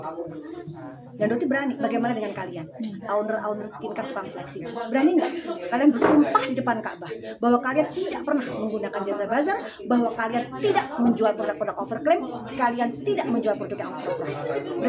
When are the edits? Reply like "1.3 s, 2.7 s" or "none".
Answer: none